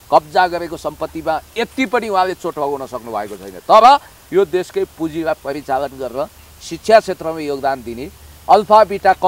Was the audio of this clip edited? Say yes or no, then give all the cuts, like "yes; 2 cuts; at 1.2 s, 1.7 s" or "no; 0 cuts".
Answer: no; 0 cuts